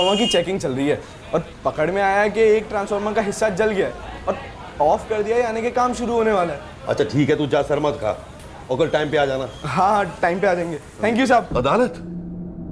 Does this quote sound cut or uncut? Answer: cut